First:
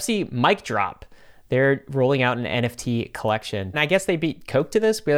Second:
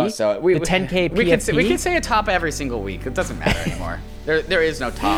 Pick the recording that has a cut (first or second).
first